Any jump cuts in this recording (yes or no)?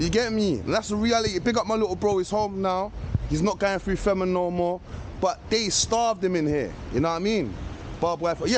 no